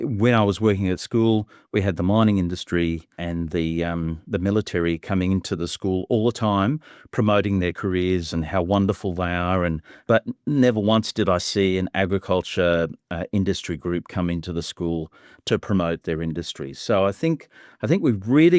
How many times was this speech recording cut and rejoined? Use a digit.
1